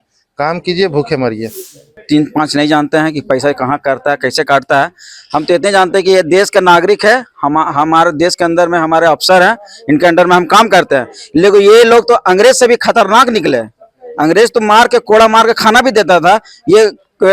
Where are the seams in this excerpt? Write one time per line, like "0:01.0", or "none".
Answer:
0:02.0